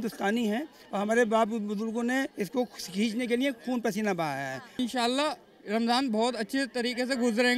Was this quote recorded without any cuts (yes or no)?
no